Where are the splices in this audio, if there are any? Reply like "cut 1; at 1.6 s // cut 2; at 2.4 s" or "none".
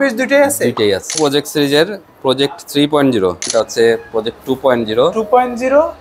cut 1; at 1.2 s // cut 2; at 3.5 s